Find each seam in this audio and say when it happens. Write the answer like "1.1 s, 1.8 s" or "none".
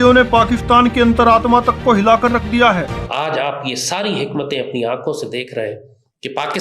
3.0 s